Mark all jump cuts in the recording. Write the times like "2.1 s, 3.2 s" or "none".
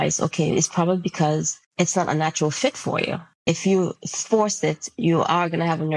1.6 s, 3.3 s